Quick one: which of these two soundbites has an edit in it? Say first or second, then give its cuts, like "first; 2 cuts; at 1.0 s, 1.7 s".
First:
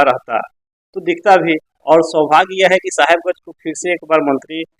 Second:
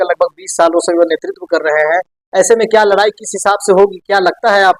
first; 1 cut; at 1.7 s